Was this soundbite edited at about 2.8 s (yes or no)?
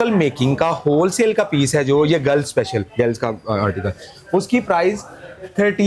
no